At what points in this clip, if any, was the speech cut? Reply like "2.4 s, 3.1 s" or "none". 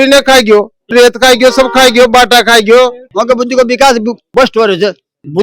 0.9 s, 3.0 s